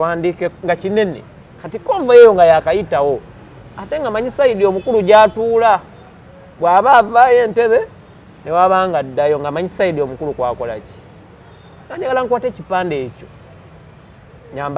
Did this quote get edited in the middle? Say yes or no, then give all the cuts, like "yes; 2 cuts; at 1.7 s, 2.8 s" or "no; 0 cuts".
no; 0 cuts